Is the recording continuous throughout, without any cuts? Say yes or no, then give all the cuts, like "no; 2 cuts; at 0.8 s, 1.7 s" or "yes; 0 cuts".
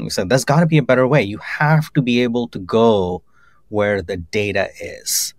yes; 0 cuts